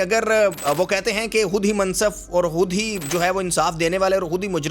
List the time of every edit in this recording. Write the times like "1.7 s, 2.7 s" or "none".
none